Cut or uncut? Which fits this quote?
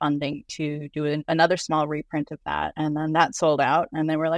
cut